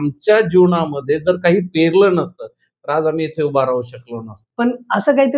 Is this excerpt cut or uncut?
cut